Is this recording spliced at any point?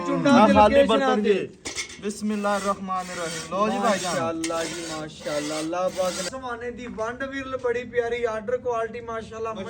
yes; 1 cut; at 6.3 s

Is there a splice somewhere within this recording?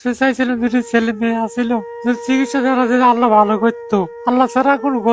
no; 0 cuts

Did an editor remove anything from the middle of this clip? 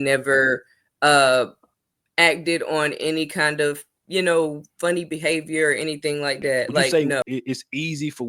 yes; 1 cut; at 6.9 s

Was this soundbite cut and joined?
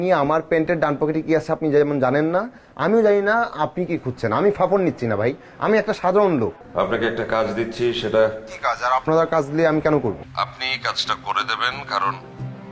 yes; 1 cut; at 6.6 s

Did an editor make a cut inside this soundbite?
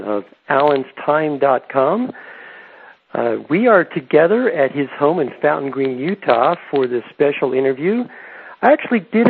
yes; 1 cut; at 7.7 s

